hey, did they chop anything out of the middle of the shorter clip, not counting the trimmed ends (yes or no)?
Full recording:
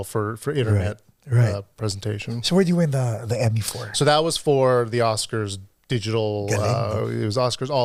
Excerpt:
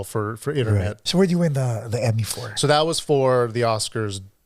yes